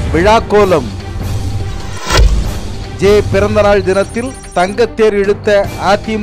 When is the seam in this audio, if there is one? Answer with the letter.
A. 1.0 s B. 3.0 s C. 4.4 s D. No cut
B